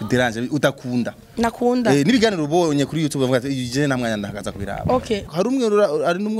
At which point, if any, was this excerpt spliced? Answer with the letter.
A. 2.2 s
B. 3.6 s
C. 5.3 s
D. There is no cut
C